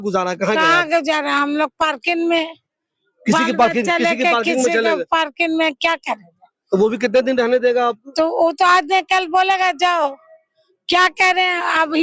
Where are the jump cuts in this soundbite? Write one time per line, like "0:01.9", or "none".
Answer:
none